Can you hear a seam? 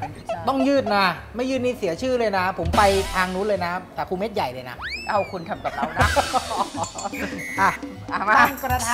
no; 0 cuts

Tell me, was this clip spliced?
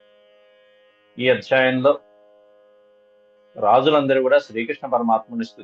yes; 1 cut; at 1.1 s

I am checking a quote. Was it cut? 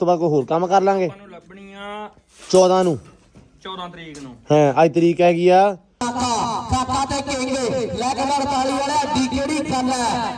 yes; 1 cut; at 6.0 s

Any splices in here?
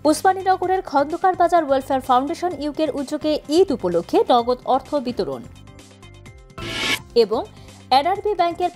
no; 0 cuts

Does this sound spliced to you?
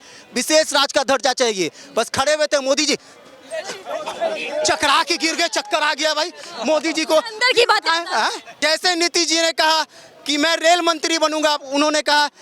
yes; 1 cut; at 8.5 s

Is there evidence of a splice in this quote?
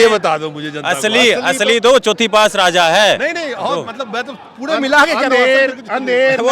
no; 0 cuts

